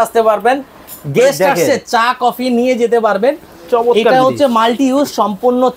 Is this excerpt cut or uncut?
uncut